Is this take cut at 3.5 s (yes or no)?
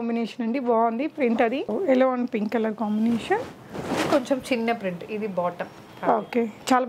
no